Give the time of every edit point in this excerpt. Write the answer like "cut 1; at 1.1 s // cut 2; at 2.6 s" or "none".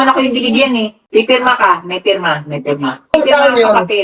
cut 1; at 1.0 s